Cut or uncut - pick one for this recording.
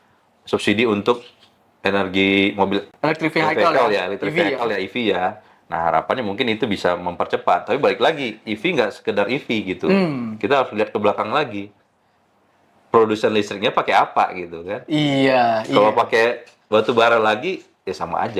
uncut